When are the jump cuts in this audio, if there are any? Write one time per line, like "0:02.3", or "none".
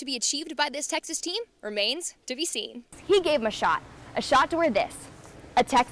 0:03.0